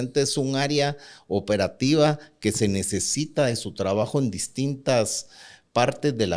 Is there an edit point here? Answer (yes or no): no